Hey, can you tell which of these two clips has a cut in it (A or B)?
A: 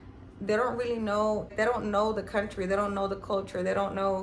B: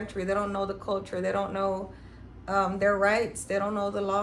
A